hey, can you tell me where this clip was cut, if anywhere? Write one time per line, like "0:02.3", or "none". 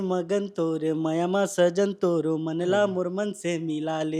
none